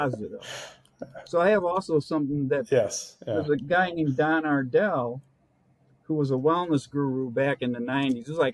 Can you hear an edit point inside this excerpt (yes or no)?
no